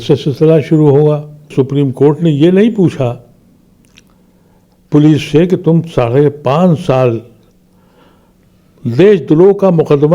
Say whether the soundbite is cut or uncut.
cut